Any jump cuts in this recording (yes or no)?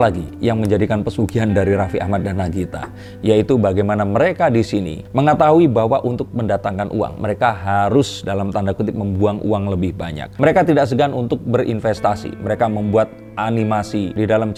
no